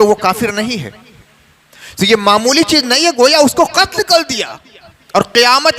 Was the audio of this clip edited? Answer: no; 0 cuts

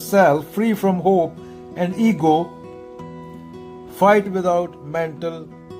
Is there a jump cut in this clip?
no; 0 cuts

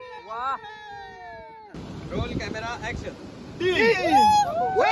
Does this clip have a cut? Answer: yes; 1 cut; at 1.8 s

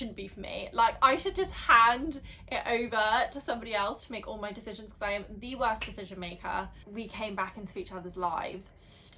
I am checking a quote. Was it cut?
yes; 1 cut; at 6.8 s

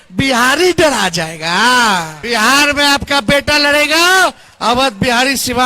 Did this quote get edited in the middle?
yes; 1 cut; at 2.2 s

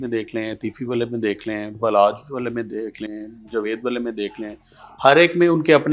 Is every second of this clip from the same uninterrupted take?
yes; 0 cuts

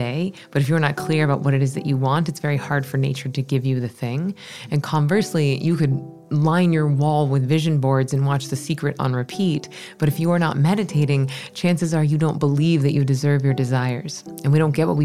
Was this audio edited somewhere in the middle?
no; 0 cuts

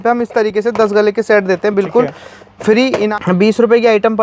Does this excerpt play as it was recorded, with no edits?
no; 1 cut; at 3.1 s

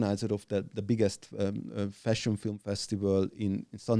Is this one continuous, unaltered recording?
yes; 0 cuts

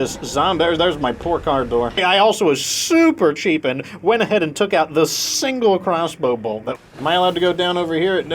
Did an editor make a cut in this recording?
yes; 2 cuts; at 2.0 s, 6.7 s

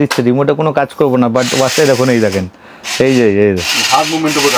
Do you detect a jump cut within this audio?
no; 0 cuts

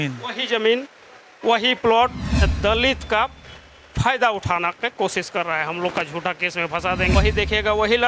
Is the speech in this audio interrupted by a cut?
yes; 2 cuts; at 2.5 s, 7.1 s

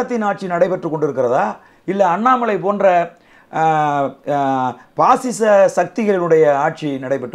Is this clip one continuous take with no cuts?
yes; 0 cuts

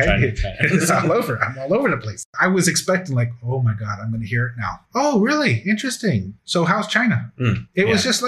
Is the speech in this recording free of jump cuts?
no; 1 cut; at 2.3 s

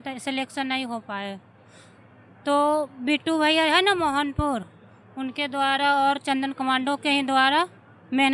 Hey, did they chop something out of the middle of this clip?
no; 0 cuts

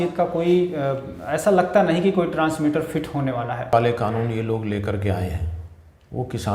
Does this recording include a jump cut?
yes; 1 cut; at 3.7 s

